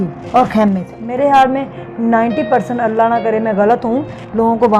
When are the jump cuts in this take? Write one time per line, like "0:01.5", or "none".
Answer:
0:01.0